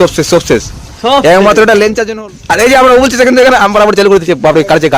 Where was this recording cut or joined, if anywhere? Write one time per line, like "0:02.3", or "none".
0:02.0